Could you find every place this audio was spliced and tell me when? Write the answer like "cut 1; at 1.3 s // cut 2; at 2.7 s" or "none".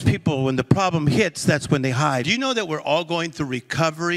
cut 1; at 2.2 s